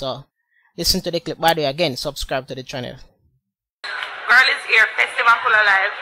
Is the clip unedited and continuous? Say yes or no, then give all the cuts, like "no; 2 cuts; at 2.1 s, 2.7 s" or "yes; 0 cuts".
no; 1 cut; at 2.9 s